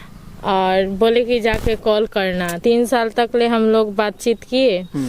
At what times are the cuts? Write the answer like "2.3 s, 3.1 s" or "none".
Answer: 2.5 s